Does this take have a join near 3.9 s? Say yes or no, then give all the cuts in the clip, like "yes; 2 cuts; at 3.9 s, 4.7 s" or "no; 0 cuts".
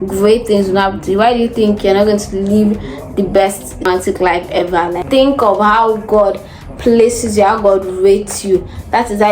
yes; 2 cuts; at 3.9 s, 5.0 s